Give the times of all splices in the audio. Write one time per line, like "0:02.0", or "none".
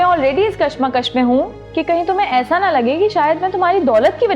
0:01.6

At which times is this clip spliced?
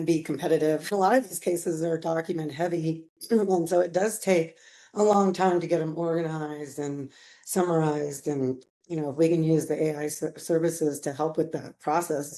0:00.9

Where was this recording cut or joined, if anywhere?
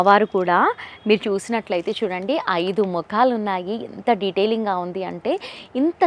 none

